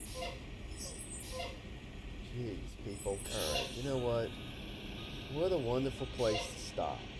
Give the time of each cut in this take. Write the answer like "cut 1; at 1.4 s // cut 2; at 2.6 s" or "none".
cut 1; at 3.2 s